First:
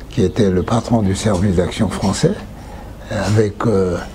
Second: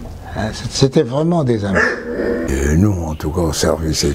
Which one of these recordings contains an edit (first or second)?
second